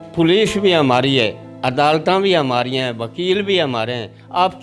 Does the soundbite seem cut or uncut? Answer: uncut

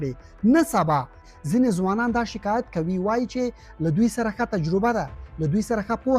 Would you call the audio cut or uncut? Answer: cut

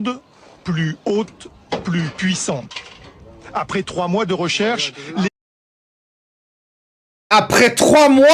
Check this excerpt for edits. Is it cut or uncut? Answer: uncut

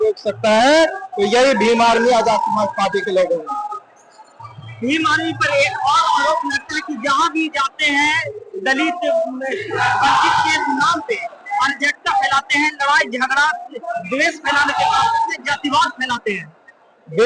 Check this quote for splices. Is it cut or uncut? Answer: uncut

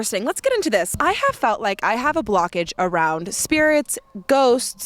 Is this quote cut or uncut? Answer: cut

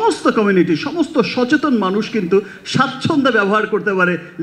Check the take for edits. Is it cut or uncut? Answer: uncut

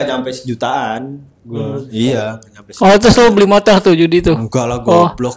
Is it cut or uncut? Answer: uncut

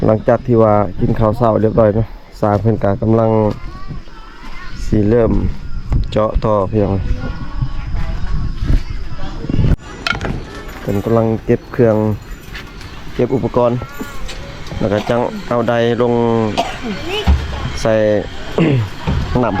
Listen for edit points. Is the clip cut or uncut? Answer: cut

